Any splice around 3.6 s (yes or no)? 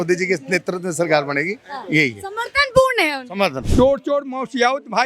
yes